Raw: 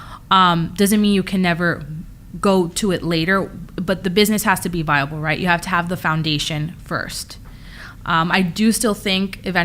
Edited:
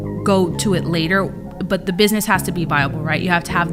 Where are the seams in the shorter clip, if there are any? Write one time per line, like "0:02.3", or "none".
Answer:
none